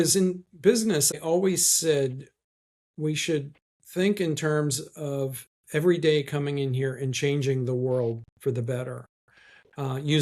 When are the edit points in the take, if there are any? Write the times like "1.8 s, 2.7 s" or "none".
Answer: 1.1 s

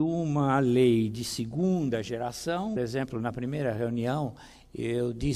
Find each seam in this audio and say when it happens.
none

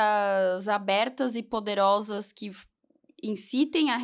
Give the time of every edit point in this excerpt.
none

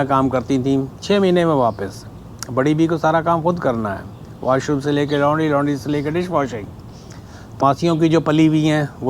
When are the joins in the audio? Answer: 7.6 s

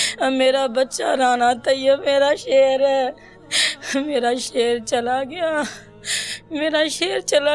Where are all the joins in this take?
6.1 s

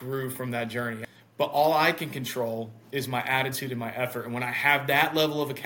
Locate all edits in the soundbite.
1.0 s

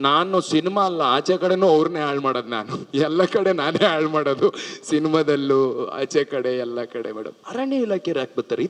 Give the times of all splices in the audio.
7.4 s

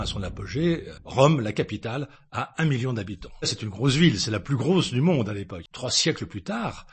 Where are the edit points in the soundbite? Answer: 1.0 s, 3.5 s, 5.6 s

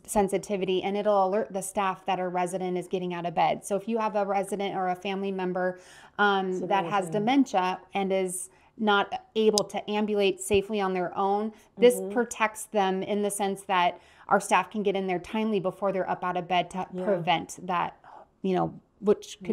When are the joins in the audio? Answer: none

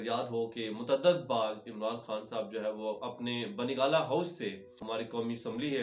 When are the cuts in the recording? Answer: 4.8 s

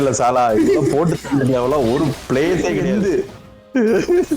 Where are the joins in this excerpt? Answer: 2.8 s

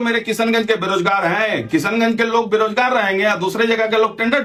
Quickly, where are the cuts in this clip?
none

